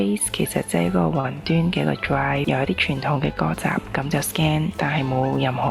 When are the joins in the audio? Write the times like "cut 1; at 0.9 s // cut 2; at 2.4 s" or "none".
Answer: cut 1; at 2.4 s // cut 2; at 4.7 s